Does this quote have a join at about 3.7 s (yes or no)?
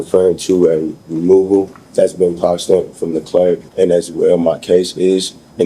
yes